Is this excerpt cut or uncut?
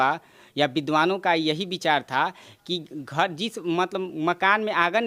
uncut